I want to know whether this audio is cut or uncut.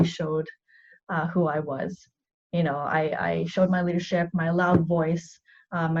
uncut